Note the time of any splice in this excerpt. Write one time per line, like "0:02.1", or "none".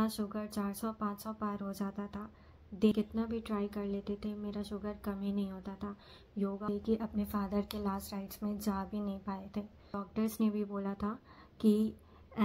0:02.9
0:06.7
0:10.0